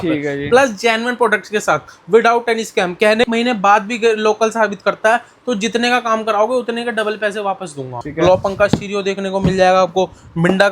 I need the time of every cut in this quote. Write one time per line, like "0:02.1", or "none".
0:03.3
0:08.0